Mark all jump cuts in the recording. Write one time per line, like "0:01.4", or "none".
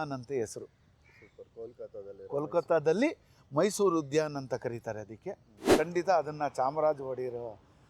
0:05.7